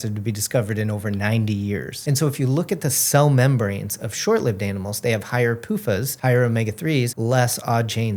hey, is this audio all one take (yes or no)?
no